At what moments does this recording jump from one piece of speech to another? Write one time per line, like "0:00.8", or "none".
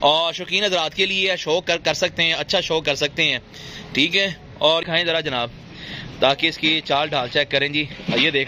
0:04.8